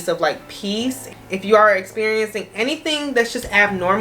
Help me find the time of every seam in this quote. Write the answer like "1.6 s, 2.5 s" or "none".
1.0 s